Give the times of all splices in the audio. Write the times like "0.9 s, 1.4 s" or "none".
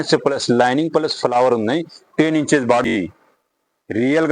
2.9 s